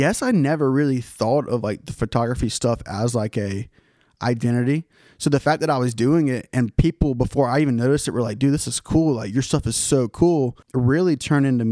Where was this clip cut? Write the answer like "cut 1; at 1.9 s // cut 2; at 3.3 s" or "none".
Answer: cut 1; at 10.6 s